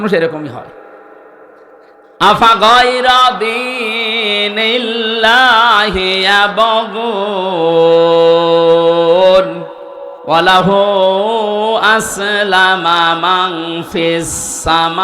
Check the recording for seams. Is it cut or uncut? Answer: cut